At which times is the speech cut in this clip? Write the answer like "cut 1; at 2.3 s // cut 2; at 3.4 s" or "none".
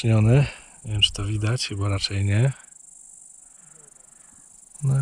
none